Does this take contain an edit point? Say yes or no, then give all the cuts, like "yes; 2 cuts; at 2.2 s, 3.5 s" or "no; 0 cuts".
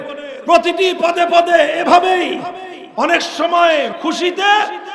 yes; 1 cut; at 3.9 s